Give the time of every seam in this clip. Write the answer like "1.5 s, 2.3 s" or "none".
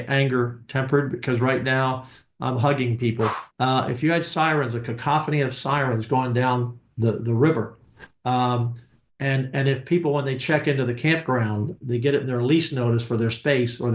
3.4 s